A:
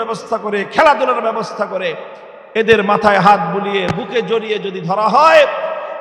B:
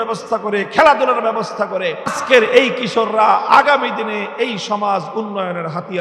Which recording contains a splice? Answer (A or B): B